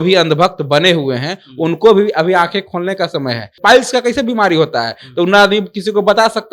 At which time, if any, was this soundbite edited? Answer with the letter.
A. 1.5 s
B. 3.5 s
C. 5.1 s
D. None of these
B